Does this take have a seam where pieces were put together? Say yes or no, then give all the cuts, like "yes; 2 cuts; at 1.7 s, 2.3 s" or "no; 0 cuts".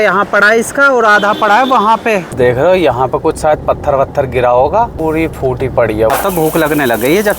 yes; 3 cuts; at 2.3 s, 5.0 s, 6.1 s